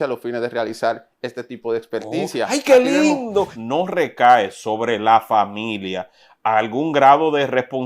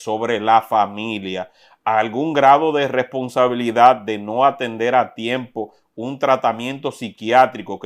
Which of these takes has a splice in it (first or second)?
first